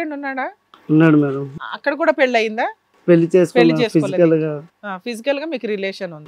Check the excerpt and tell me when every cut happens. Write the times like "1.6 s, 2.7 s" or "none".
1.6 s